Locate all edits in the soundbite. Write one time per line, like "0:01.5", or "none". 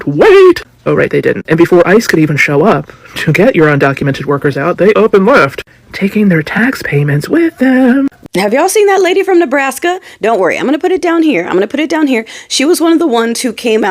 0:08.2